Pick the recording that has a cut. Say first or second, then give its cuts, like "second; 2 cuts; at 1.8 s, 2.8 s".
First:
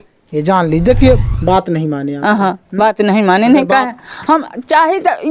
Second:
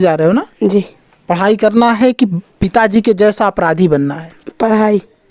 first; 1 cut; at 1.3 s